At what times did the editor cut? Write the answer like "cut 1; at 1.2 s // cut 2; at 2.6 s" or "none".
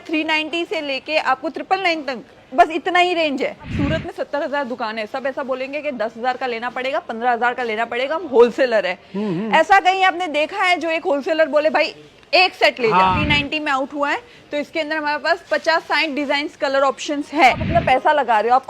cut 1; at 3.7 s // cut 2; at 13.2 s // cut 3; at 17.6 s